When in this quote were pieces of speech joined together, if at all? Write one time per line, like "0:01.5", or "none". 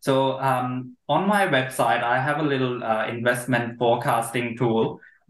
none

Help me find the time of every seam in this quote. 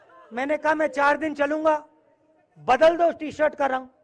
none

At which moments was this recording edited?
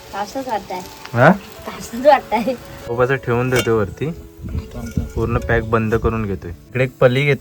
0:02.8

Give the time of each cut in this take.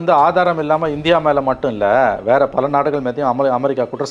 none

